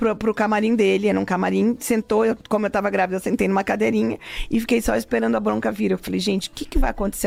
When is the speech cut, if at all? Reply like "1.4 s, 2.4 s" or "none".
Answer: none